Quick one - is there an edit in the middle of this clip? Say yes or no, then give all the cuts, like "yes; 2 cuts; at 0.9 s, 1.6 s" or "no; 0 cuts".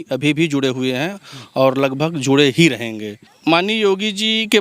yes; 1 cut; at 3.2 s